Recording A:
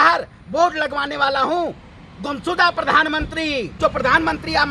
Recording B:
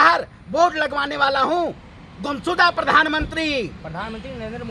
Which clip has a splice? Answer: A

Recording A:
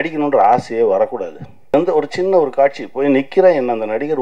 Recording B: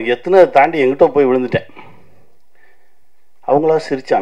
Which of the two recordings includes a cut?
A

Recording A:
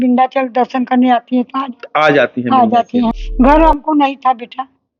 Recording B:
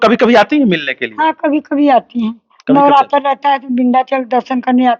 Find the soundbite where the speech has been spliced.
A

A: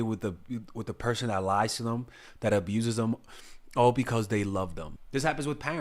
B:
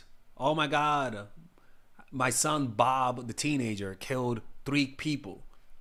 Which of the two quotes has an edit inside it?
A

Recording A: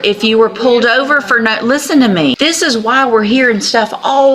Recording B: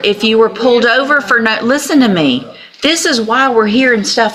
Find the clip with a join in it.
A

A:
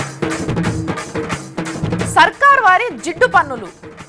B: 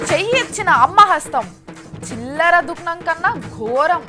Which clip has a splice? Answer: A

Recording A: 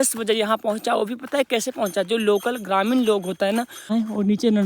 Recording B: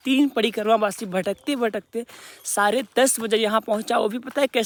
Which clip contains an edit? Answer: A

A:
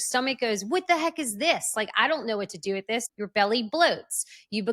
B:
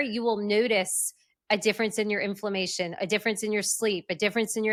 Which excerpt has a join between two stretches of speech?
A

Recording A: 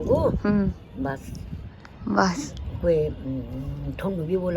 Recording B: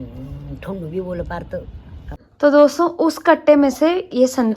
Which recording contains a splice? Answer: B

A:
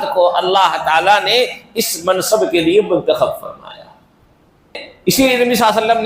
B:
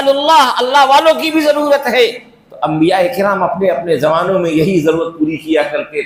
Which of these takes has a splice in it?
A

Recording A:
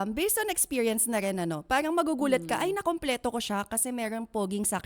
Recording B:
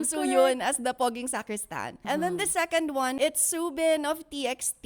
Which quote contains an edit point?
B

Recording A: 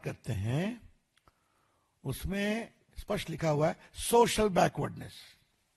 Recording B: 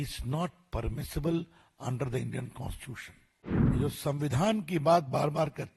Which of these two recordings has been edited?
B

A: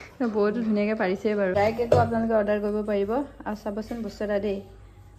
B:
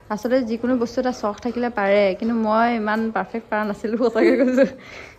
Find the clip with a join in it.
A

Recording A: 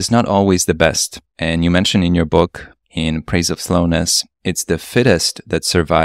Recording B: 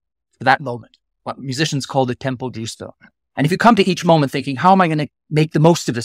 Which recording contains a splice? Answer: B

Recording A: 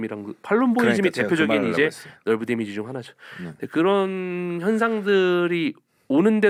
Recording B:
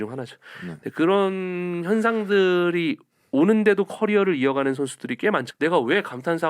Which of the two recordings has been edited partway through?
B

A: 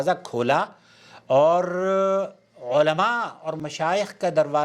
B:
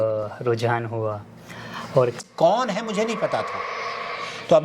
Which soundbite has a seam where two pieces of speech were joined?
B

